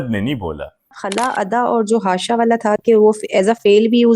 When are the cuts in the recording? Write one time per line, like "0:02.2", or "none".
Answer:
0:01.0